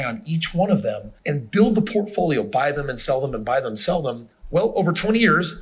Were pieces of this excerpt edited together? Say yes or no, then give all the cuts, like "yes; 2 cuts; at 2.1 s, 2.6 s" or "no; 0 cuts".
yes; 2 cuts; at 1.0 s, 4.2 s